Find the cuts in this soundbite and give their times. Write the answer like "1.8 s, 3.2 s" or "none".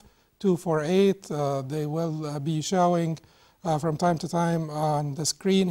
2.7 s